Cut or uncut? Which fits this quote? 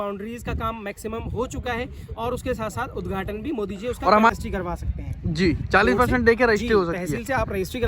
cut